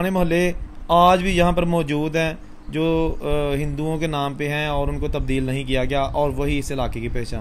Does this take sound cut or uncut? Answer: uncut